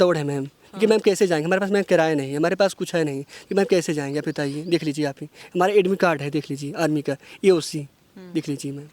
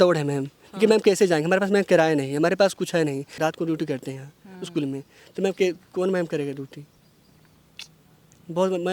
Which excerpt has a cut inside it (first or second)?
second